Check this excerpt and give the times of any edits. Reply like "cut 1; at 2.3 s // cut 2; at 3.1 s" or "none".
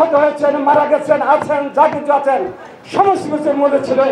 none

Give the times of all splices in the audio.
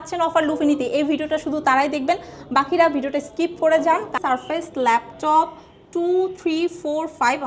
cut 1; at 4.2 s

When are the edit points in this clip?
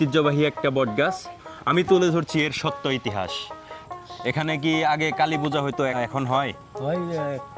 cut 1; at 1.3 s // cut 2; at 3.9 s // cut 3; at 5.9 s

